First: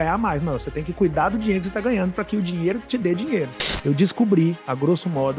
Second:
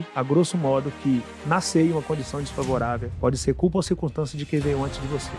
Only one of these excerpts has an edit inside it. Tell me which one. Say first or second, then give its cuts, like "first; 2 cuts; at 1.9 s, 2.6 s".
first; 1 cut; at 3.6 s